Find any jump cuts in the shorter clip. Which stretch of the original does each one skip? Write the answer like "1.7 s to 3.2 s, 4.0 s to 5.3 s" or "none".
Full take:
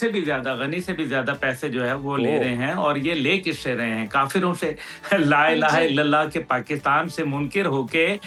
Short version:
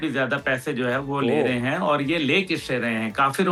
none